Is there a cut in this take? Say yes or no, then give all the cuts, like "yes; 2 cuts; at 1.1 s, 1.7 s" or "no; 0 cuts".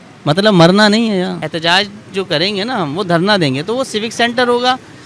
yes; 1 cut; at 1.4 s